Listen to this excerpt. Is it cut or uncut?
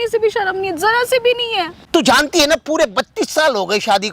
cut